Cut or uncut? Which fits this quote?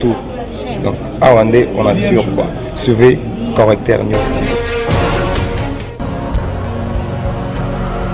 uncut